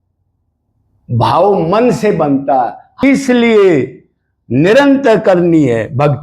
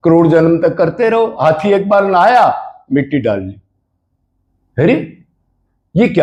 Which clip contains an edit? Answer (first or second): first